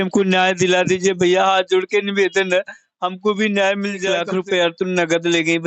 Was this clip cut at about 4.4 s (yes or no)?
yes